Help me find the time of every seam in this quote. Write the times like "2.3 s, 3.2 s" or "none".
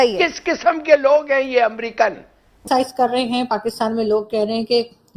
2.7 s